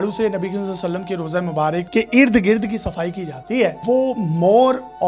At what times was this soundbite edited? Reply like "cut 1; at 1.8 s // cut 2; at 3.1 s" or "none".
cut 1; at 1.9 s // cut 2; at 3.8 s